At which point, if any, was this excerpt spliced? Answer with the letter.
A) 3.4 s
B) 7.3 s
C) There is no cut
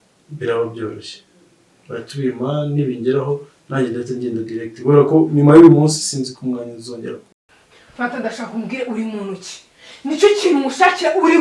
B